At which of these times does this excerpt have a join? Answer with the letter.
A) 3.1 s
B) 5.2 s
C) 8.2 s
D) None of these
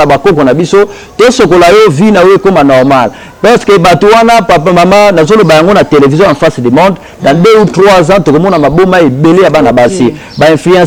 D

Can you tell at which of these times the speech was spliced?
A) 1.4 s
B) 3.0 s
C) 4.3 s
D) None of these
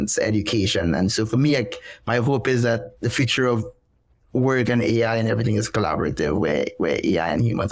D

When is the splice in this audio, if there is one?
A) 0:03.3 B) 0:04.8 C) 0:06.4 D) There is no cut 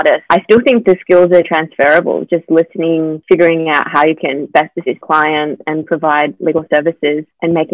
B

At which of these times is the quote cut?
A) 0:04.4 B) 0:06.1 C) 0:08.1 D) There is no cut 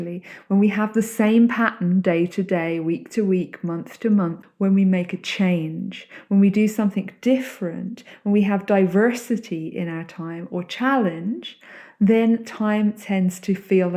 A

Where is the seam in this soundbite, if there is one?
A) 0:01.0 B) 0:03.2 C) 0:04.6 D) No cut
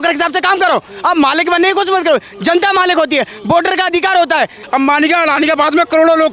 C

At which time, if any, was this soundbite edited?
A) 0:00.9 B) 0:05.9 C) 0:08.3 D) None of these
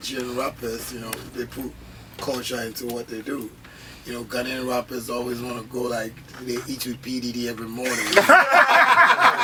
D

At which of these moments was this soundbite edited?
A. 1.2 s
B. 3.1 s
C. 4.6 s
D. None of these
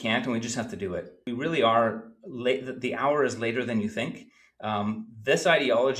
A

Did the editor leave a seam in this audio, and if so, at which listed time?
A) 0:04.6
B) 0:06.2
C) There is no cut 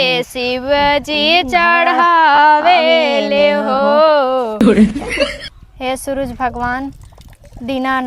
A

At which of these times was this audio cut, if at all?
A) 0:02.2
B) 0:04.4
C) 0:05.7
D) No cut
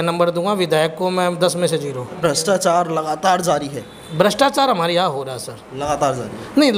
A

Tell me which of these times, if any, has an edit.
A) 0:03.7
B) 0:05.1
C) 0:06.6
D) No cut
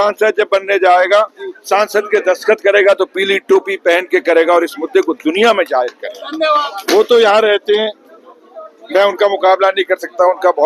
C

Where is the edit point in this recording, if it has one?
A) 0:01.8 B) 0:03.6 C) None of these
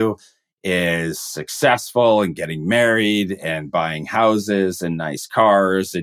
C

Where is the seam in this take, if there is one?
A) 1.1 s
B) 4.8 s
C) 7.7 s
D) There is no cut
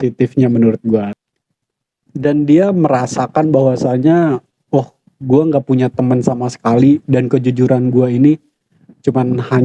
A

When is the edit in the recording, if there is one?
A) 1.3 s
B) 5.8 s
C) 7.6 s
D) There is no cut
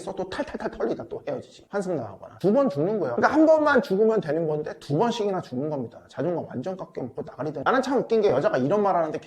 C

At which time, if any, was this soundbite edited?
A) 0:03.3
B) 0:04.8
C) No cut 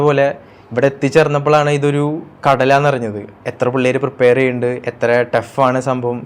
C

